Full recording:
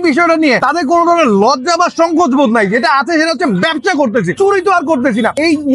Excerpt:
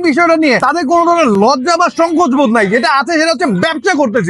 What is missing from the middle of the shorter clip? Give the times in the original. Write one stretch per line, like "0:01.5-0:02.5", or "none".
none

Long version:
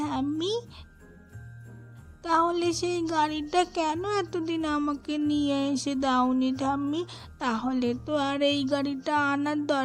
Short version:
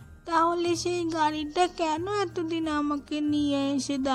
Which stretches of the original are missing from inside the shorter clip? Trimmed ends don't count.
none

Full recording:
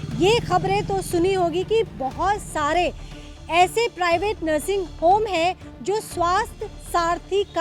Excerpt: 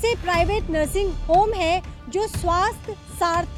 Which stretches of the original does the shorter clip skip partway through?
none

